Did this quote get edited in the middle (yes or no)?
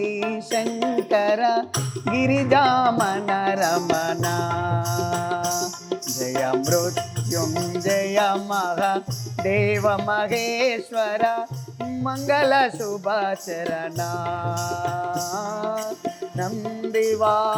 no